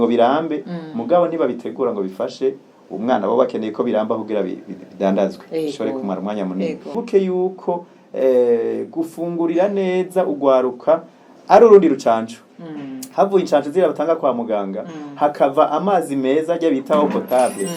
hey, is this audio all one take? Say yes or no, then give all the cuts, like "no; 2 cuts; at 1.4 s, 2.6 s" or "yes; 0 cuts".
no; 1 cut; at 7.0 s